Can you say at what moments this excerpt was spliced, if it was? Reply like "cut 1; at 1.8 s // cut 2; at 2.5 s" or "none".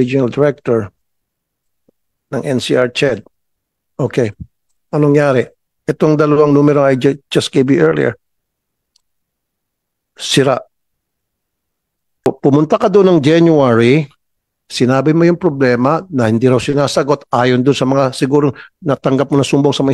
cut 1; at 12.3 s